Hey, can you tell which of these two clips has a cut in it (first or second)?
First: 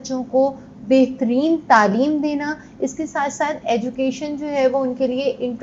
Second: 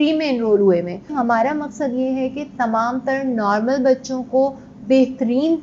second